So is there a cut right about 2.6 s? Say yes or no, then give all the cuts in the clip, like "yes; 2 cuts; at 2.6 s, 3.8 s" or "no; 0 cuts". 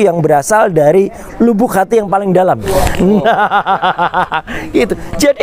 yes; 1 cut; at 2.6 s